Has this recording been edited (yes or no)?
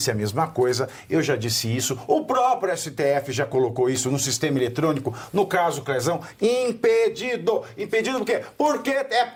no